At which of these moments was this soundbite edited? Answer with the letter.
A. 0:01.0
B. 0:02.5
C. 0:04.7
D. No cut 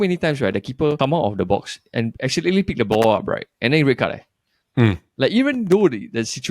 A